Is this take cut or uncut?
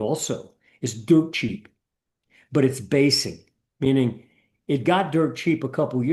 uncut